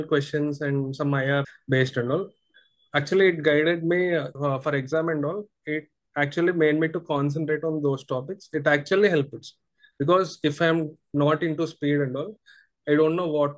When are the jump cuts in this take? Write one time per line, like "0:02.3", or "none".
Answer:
0:01.5
0:04.3